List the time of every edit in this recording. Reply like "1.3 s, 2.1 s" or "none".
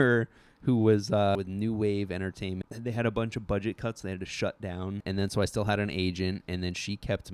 1.3 s, 2.7 s, 5.0 s